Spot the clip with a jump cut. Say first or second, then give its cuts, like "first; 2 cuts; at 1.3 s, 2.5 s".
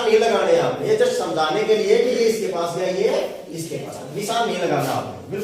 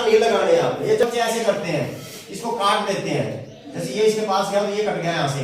second; 1 cut; at 1.0 s